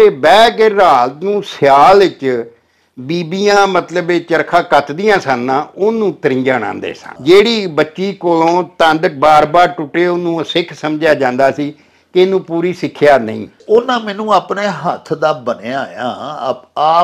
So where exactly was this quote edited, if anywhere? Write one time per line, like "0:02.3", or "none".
0:07.1
0:13.5